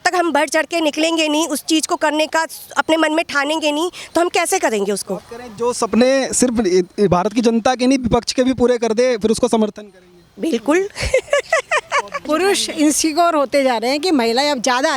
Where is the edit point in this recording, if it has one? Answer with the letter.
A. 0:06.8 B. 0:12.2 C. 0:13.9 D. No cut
B